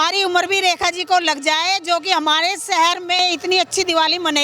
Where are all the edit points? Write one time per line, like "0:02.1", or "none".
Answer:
0:03.2